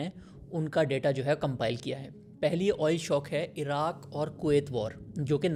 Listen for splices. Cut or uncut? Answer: uncut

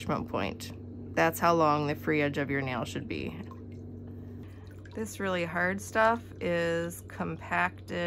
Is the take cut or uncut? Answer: cut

